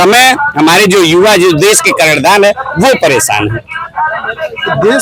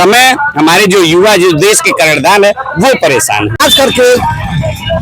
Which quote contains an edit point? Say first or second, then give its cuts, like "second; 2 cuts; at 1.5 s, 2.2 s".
second; 1 cut; at 3.6 s